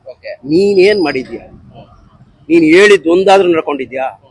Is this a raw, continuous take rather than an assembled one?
yes; 0 cuts

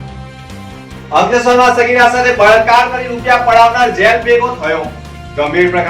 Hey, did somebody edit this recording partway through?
yes; 1 cut; at 1.0 s

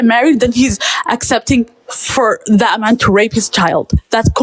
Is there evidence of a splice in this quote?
no; 0 cuts

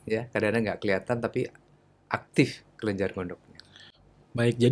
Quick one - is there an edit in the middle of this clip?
no; 0 cuts

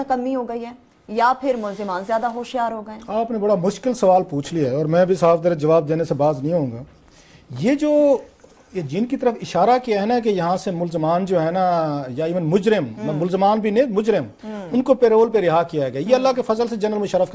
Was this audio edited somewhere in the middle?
yes; 1 cut; at 13.9 s

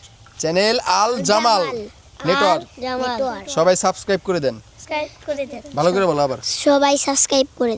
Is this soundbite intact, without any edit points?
no; 1 cut; at 4.7 s

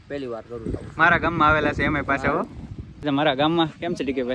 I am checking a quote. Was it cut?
yes; 1 cut; at 3.0 s

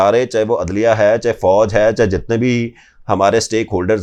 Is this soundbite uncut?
yes; 0 cuts

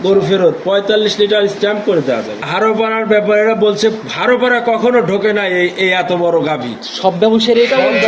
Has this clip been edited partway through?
yes; 1 cut; at 2.4 s

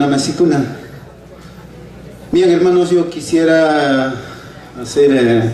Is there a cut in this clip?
no; 0 cuts

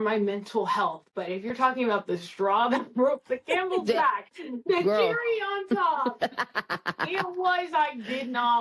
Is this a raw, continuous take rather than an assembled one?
yes; 0 cuts

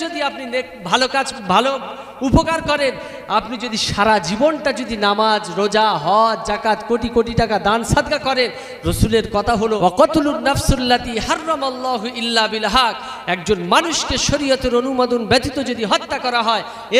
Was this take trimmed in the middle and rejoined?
yes; 1 cut; at 9.8 s

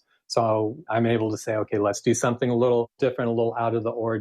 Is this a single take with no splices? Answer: no; 3 cuts; at 0.8 s, 2.0 s, 3.0 s

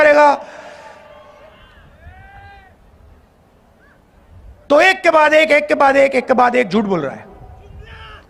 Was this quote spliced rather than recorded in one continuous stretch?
no; 0 cuts

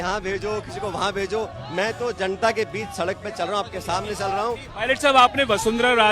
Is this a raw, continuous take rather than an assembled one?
no; 1 cut; at 4.7 s

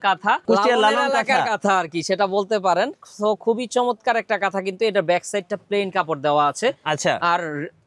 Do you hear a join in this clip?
no; 0 cuts

